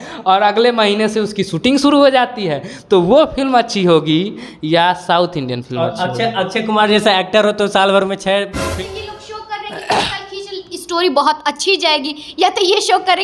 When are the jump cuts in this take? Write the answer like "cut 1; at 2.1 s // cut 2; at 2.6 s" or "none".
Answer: cut 1; at 8.7 s